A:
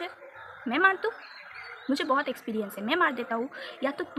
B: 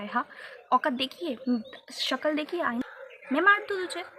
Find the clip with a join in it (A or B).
B